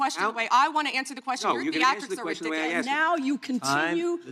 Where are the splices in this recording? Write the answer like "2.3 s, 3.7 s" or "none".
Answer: 2.8 s